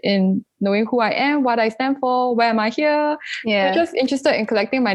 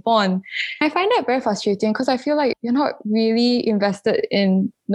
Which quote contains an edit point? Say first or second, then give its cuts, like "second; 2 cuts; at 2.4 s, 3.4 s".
second; 2 cuts; at 0.8 s, 2.5 s